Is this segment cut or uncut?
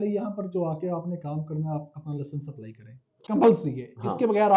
cut